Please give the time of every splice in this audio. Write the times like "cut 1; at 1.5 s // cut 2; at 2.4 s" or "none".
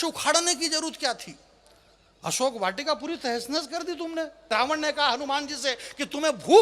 cut 1; at 4.5 s